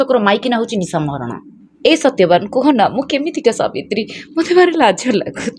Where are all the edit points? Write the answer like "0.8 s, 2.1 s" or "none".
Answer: 1.6 s